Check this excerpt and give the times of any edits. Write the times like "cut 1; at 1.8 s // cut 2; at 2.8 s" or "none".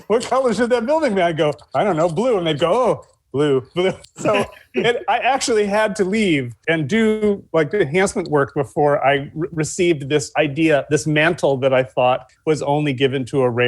cut 1; at 4.1 s